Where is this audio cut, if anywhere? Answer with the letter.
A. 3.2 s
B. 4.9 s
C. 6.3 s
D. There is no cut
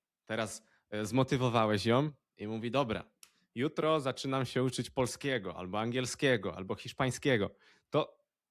D